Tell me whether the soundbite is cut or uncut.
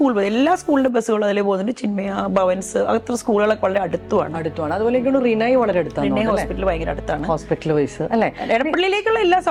uncut